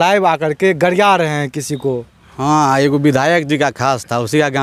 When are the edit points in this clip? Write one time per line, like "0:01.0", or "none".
none

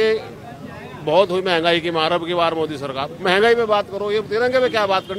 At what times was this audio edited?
none

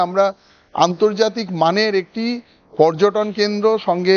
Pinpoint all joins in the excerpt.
none

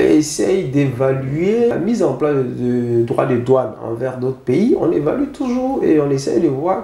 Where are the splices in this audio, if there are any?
0:01.7

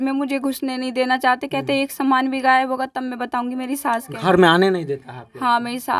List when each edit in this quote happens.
none

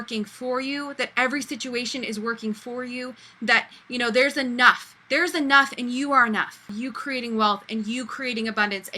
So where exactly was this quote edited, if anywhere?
0:06.7

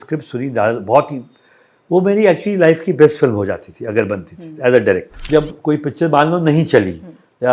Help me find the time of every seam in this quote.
0:05.2

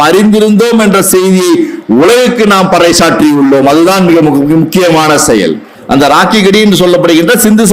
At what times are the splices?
0:05.7

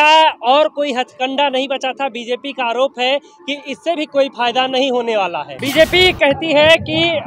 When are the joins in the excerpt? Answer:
0:05.5

